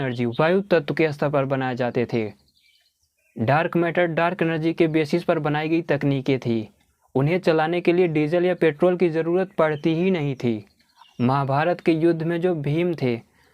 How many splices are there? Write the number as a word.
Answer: one